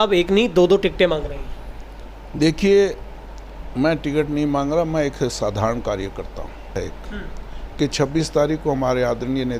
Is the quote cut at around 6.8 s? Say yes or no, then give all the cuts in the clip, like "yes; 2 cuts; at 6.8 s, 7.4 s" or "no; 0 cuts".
yes; 1 cut; at 6.8 s